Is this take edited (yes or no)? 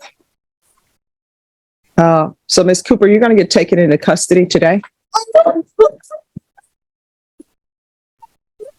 yes